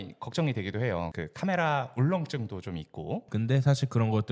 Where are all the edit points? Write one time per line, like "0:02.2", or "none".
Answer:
0:03.3

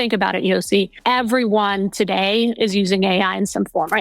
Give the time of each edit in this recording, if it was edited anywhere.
0:00.9

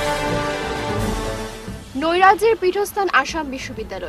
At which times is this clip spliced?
0:01.0

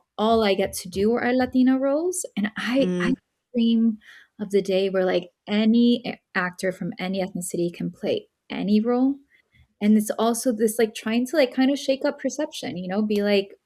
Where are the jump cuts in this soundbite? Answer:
none

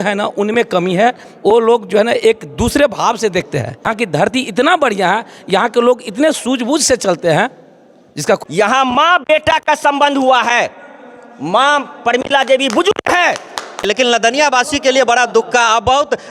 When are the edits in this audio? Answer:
0:03.9
0:08.4
0:13.8

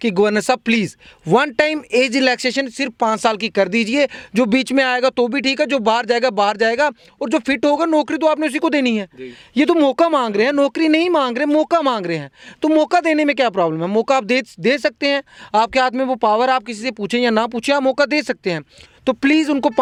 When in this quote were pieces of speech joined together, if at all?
none

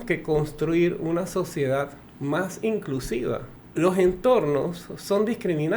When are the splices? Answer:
0:02.0
0:03.6

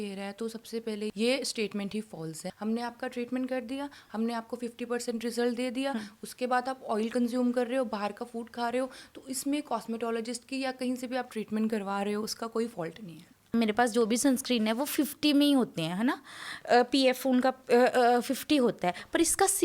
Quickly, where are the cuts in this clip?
0:02.5
0:13.5

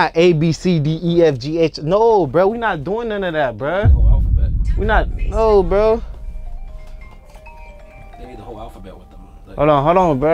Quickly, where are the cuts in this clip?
none

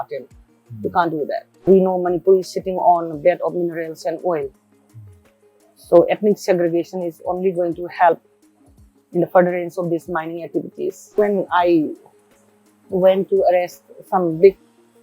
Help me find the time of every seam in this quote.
0:01.6
0:11.2

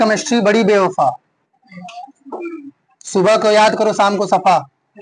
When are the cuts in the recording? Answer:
none

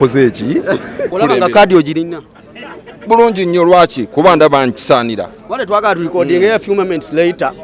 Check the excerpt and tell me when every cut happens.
0:01.0

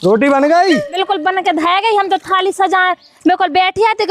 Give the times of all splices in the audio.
0:01.0

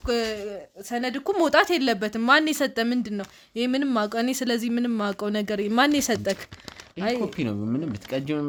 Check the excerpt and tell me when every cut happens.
none

